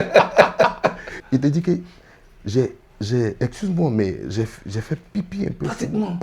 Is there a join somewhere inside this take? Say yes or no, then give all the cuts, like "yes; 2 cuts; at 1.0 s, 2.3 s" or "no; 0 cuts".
yes; 1 cut; at 1.1 s